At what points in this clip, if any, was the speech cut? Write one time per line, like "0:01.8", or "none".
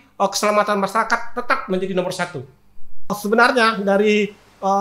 0:03.1